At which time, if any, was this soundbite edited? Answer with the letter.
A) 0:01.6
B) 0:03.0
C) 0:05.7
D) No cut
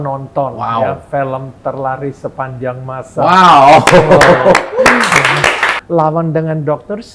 C